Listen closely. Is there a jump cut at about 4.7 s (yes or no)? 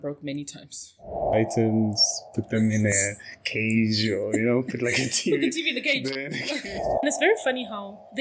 no